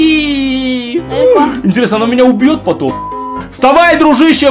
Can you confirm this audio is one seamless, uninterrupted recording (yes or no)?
no